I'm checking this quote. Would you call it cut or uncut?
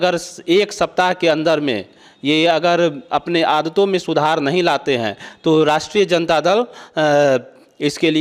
uncut